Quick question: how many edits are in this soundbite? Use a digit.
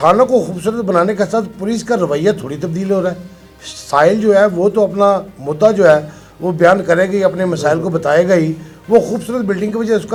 0